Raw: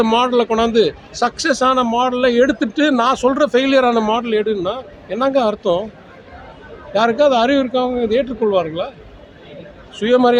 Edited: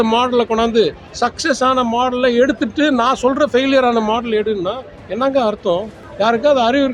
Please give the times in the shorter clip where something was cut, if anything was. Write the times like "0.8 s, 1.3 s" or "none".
6.0 s